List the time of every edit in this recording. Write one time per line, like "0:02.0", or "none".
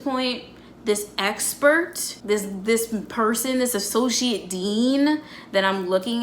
0:02.1